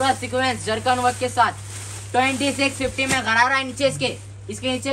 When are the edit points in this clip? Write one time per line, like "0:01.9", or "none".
none